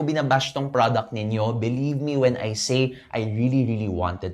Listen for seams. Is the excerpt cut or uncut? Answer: uncut